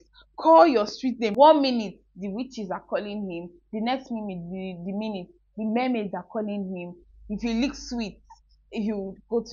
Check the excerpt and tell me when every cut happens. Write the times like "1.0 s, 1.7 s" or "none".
1.3 s

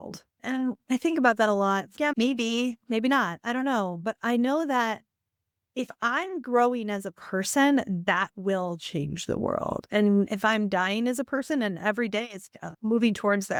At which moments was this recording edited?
none

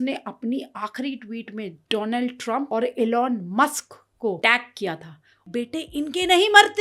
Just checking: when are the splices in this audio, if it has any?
2.7 s, 4.4 s, 5.5 s

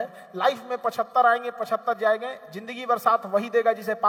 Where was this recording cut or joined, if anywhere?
none

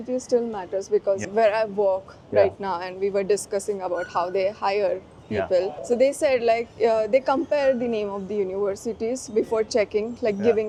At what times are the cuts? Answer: none

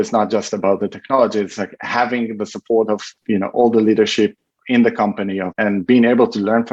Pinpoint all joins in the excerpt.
3.1 s, 5.5 s

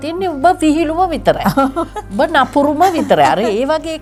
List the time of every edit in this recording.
none

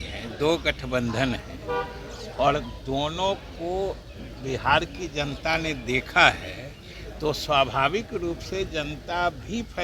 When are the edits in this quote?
none

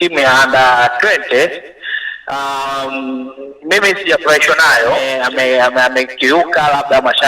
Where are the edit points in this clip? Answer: 5.1 s

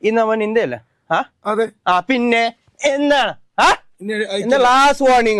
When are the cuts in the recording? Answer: none

